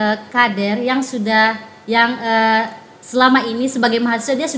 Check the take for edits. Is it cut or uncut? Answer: uncut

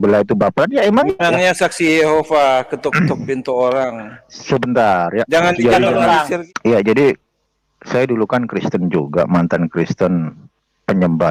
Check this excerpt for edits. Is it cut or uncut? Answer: cut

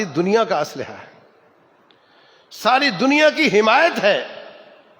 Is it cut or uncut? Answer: uncut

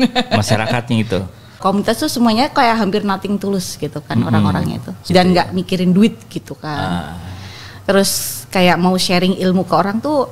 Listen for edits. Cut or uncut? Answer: cut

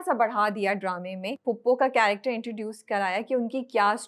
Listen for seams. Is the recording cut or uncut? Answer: cut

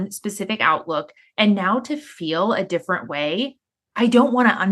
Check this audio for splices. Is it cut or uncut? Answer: cut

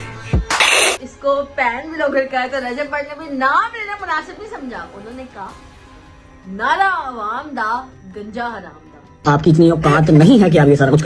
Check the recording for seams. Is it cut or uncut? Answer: cut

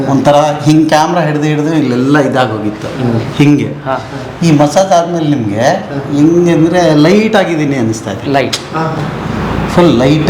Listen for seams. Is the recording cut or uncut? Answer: uncut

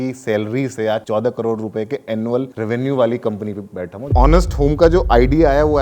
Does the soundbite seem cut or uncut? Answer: cut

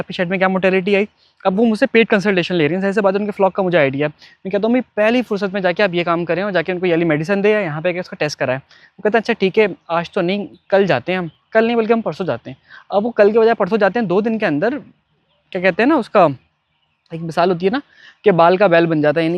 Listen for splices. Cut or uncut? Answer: uncut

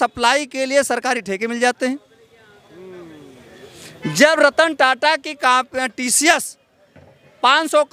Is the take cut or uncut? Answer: uncut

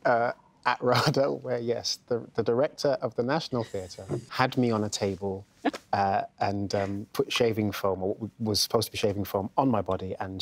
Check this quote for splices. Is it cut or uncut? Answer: cut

